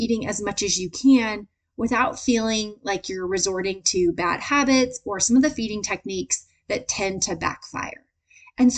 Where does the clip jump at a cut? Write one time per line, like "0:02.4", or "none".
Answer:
none